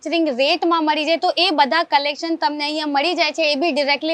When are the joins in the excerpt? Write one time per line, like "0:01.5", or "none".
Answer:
none